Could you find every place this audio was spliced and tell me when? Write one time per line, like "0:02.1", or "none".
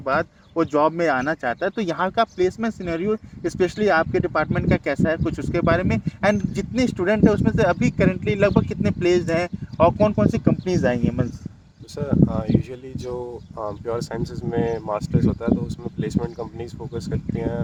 none